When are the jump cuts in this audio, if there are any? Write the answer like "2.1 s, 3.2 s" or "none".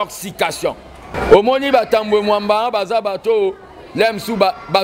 1.1 s